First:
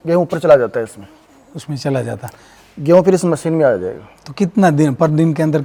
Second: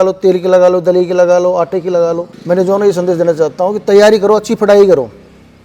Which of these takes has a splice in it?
second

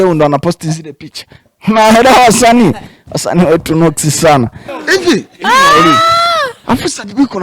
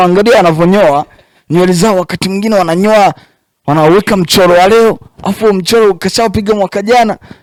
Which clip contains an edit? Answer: first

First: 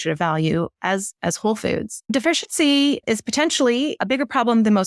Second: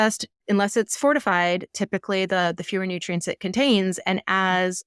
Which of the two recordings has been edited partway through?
first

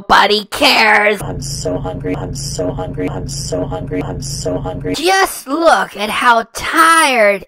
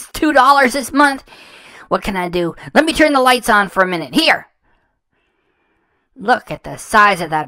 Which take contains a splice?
first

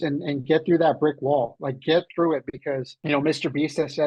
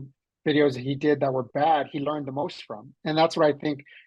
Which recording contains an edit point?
first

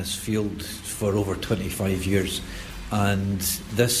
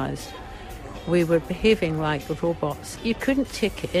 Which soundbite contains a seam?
second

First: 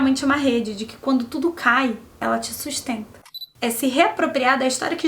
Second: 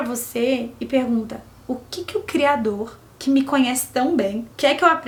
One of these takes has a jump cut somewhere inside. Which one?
first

